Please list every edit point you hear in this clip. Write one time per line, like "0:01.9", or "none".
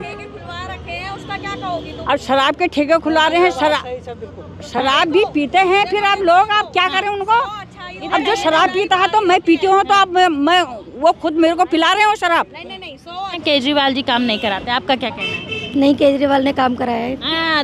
0:13.4